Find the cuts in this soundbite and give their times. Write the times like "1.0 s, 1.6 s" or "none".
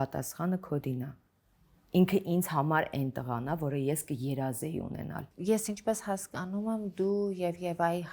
5.2 s